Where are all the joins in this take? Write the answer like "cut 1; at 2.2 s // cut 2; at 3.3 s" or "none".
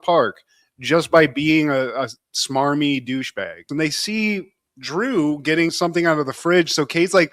cut 1; at 3.7 s